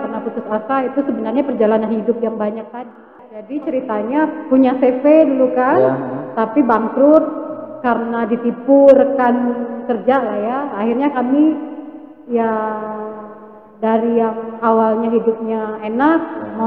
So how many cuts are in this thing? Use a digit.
1